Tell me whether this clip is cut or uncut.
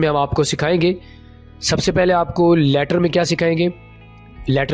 uncut